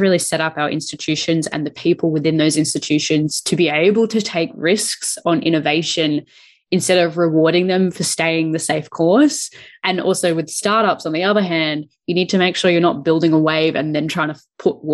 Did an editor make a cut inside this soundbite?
no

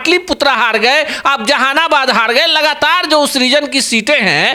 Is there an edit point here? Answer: no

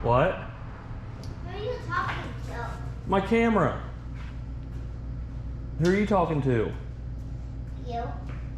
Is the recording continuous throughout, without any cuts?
yes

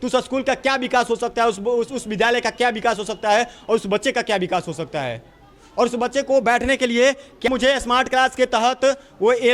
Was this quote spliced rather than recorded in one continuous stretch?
yes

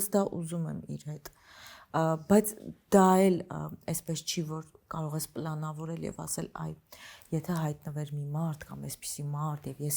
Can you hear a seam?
no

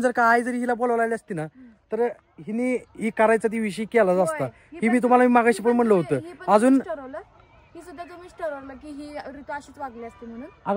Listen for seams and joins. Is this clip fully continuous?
yes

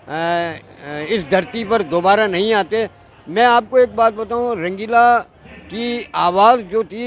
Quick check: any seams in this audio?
no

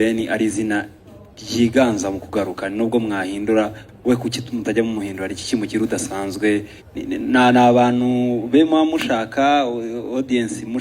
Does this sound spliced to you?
yes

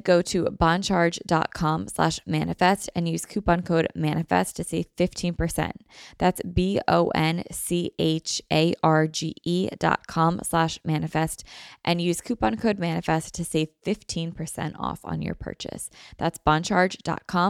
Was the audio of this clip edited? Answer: no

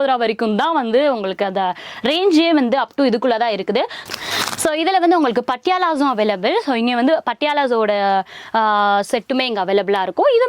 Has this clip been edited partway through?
yes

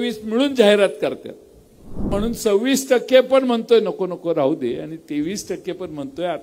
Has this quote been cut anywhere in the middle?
yes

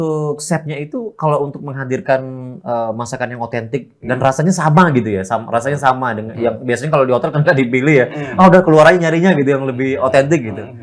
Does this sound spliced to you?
no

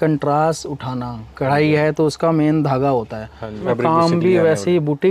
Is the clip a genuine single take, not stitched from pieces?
no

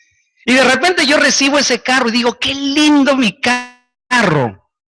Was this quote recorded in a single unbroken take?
yes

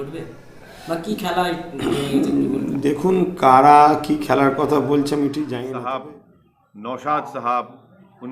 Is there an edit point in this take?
yes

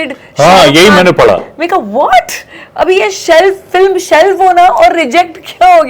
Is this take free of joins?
yes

